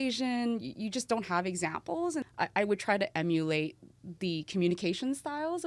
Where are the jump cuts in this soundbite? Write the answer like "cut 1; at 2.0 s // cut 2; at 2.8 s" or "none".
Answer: cut 1; at 2.2 s